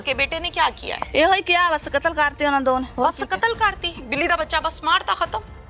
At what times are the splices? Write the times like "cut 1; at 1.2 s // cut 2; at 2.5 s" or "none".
cut 1; at 0.9 s // cut 2; at 2.9 s